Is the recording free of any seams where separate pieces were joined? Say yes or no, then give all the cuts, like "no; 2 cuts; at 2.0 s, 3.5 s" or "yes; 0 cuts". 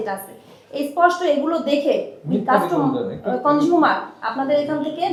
yes; 0 cuts